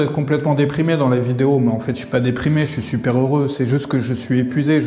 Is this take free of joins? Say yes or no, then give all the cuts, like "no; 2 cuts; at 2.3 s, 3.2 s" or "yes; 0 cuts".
yes; 0 cuts